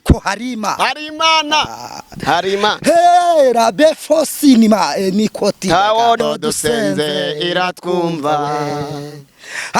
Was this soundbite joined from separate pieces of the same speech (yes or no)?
yes